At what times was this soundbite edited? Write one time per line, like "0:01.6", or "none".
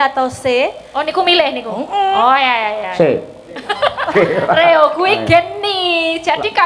0:04.1